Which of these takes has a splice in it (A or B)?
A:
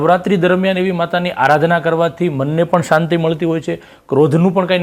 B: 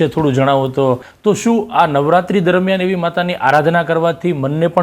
B